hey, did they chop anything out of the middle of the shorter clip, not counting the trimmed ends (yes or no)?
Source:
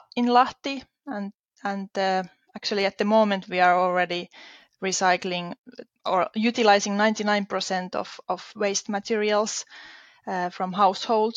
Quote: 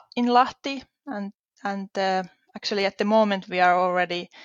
no